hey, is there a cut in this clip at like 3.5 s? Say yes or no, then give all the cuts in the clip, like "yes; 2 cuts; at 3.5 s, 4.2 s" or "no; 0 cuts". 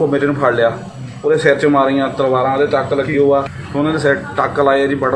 yes; 1 cut; at 3.5 s